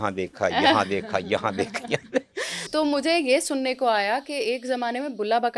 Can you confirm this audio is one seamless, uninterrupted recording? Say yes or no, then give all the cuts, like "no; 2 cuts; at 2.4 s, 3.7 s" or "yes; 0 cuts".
no; 1 cut; at 2.6 s